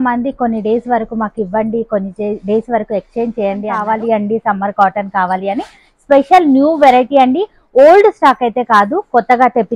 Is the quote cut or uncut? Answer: cut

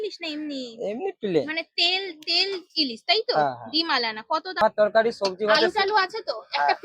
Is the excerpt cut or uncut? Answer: cut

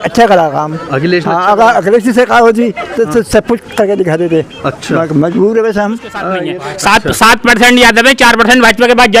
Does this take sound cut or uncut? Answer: cut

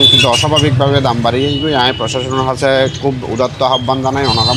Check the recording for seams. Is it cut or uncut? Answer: uncut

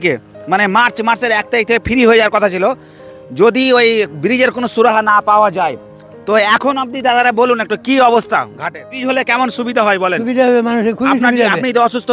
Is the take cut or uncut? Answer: cut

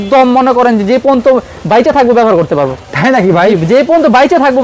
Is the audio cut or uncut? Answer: uncut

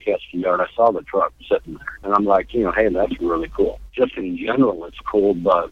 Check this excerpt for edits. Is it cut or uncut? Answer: uncut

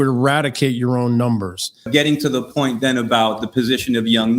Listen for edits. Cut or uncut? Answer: cut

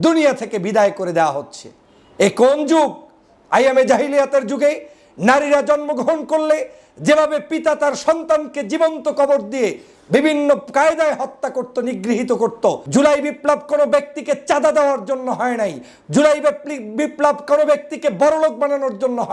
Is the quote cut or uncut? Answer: cut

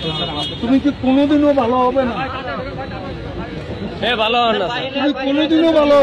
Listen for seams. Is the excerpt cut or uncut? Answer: uncut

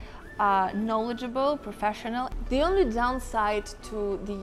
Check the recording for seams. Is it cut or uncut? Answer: cut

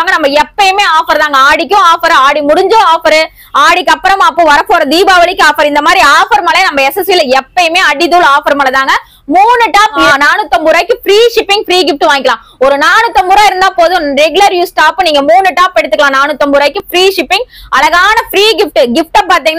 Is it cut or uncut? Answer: uncut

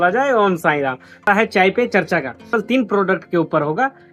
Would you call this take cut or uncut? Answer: cut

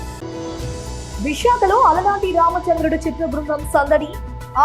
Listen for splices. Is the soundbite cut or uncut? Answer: cut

